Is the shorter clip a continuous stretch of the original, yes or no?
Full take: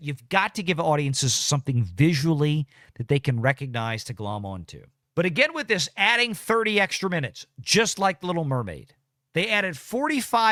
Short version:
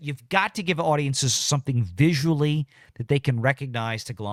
yes